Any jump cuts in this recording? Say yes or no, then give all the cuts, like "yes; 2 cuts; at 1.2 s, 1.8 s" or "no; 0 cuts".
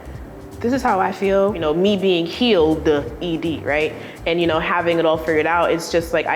yes; 1 cut; at 1.6 s